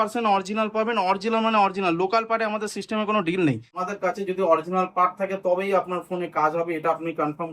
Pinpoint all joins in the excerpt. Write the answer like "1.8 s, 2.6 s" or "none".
3.9 s